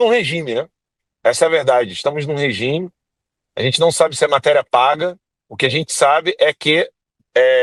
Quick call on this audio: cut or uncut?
uncut